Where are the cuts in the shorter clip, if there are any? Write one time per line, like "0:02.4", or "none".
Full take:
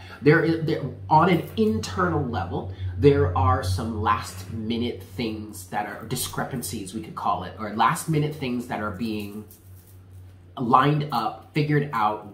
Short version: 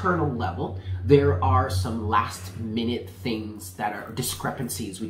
none